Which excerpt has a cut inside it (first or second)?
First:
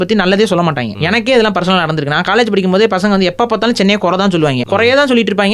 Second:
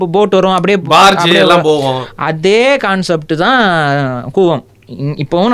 first